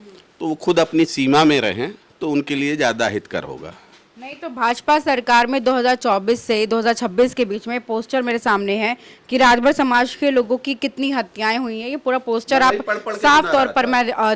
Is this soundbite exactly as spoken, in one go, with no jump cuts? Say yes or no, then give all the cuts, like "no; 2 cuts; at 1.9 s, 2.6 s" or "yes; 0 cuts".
yes; 0 cuts